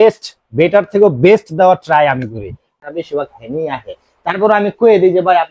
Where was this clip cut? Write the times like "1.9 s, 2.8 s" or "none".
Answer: 2.7 s